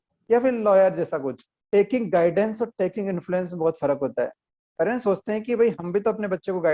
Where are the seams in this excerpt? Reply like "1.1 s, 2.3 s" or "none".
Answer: 1.5 s